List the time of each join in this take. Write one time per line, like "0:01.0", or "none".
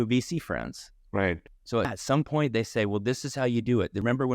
0:01.5